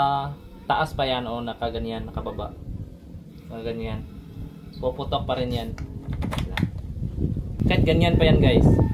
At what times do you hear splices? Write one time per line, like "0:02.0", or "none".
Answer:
0:07.6